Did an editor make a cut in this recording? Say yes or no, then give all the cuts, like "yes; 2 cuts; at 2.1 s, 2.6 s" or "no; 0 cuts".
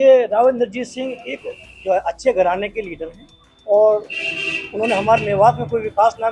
no; 0 cuts